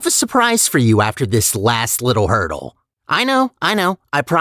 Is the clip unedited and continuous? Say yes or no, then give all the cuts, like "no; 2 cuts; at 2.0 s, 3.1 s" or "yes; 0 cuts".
yes; 0 cuts